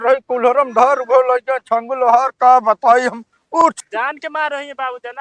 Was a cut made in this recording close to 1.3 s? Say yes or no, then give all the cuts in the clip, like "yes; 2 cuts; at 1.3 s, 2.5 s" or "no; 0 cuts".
no; 1 cut; at 3.7 s